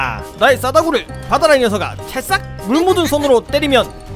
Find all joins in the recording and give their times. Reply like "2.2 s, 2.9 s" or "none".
2.5 s